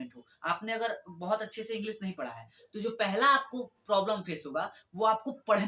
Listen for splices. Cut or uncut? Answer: uncut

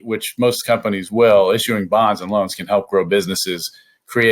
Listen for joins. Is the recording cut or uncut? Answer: uncut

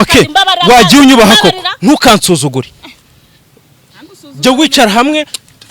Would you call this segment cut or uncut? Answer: uncut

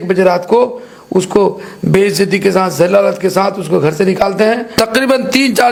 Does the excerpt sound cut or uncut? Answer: uncut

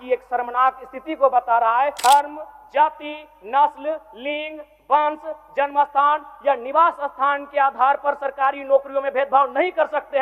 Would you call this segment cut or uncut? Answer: cut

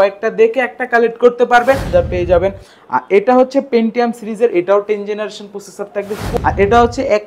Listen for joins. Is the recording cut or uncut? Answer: cut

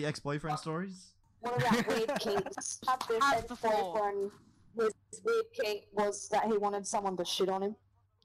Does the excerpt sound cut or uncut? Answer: uncut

